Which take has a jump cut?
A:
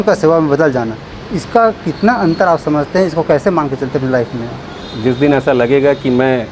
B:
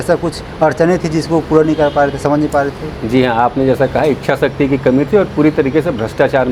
A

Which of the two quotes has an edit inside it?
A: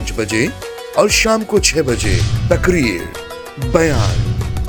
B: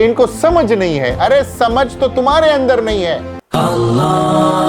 B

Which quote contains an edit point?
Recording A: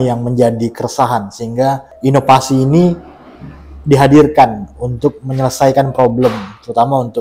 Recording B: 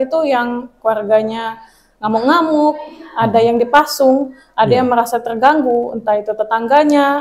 A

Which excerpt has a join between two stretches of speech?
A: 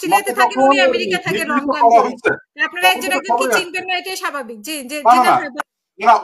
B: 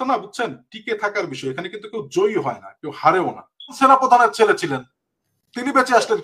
B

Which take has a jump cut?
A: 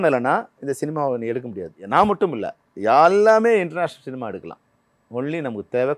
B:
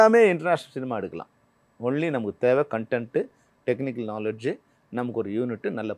A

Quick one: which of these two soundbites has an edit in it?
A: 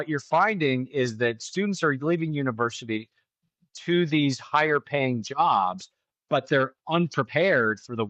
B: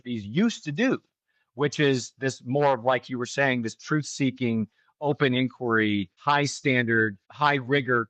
B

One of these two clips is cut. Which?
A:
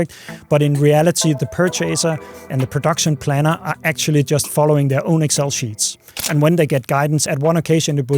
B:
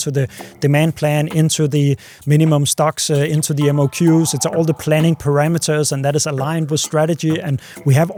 A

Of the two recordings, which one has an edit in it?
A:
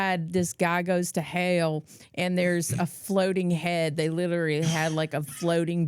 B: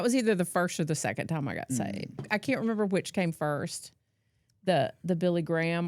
B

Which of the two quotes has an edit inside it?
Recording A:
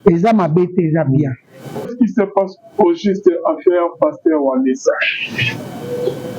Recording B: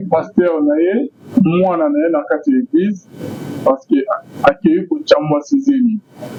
A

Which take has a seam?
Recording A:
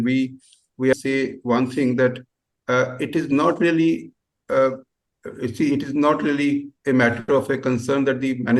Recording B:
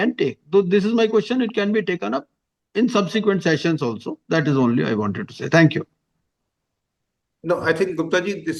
A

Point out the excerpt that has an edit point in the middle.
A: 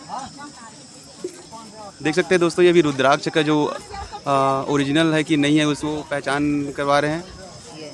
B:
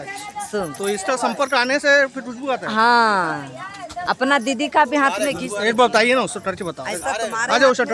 A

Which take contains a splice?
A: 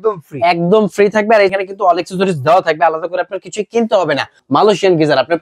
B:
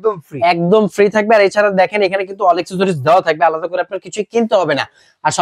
A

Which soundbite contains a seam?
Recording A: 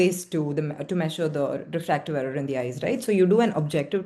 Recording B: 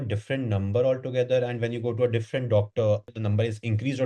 B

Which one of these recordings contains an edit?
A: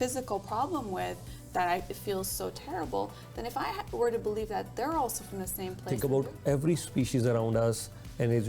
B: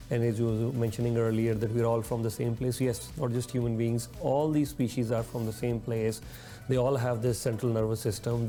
A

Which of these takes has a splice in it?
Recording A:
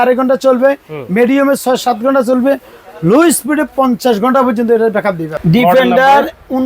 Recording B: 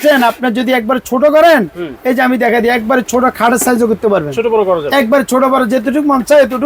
A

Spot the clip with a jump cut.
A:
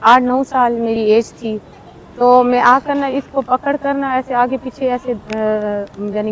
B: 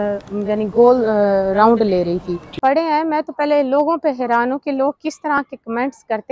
B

